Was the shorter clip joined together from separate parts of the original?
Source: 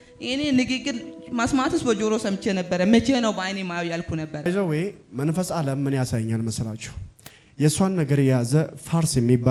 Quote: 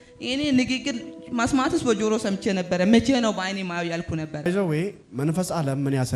no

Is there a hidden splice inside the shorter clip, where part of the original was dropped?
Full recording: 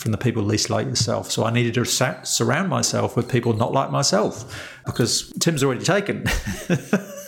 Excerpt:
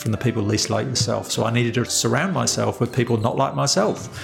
yes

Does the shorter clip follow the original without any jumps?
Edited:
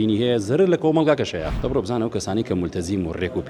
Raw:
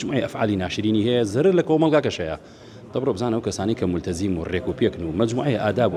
no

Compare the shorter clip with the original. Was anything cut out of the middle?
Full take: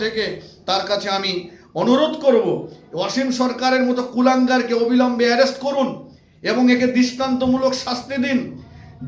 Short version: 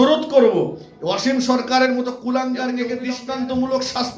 yes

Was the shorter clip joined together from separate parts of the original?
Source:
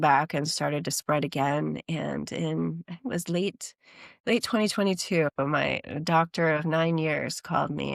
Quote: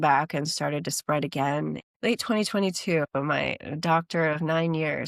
yes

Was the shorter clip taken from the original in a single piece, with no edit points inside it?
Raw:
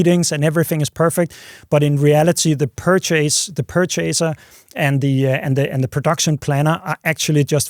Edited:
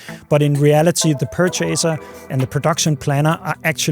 no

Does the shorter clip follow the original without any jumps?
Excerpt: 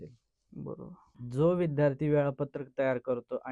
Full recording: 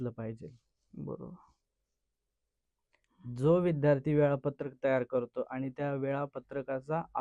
no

